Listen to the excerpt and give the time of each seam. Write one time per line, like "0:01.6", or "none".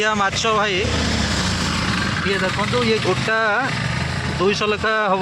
none

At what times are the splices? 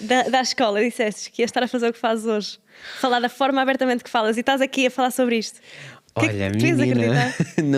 none

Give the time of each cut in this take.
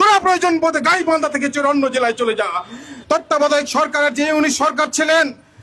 0:02.9

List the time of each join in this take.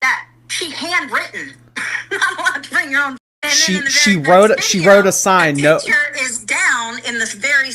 0:03.2

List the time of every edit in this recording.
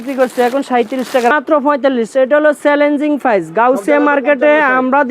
0:01.3

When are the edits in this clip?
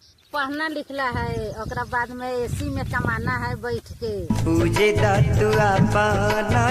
none

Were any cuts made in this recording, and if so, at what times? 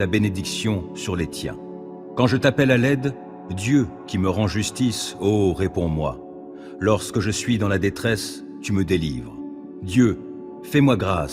0:02.0

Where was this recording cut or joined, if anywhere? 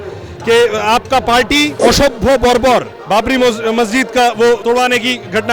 0:01.7
0:04.6

